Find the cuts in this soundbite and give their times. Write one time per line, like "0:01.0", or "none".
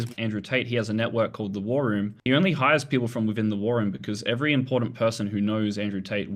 none

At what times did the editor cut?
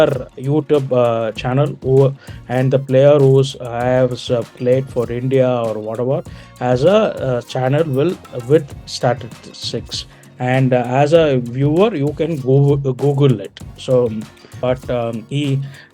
0:14.5

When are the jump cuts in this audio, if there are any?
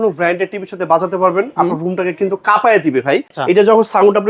0:03.3

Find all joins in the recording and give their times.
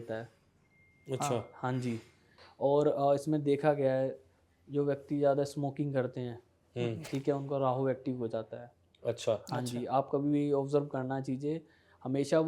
0:02.3

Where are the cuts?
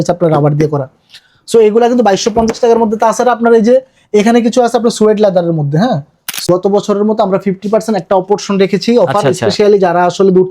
0:06.4

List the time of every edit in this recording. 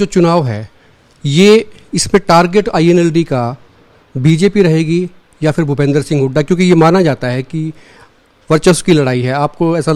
none

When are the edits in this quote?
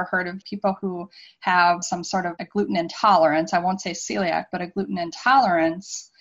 none

